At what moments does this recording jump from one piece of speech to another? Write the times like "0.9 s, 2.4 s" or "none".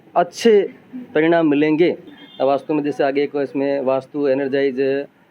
2.0 s